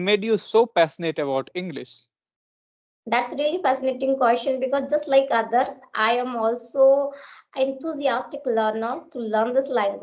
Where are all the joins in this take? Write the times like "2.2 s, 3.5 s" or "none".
none

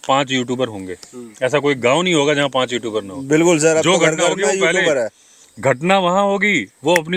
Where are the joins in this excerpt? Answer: none

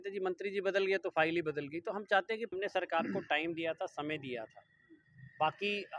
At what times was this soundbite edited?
2.5 s

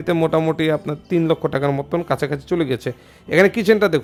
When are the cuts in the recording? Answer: none

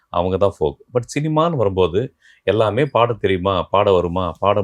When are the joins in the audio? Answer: none

